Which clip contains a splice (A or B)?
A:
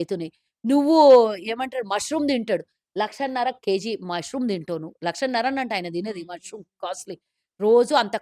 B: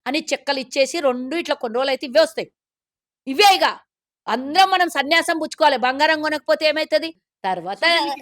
B